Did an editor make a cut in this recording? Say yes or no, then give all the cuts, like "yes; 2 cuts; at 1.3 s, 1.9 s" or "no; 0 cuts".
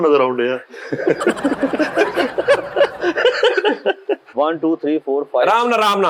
yes; 1 cut; at 4.3 s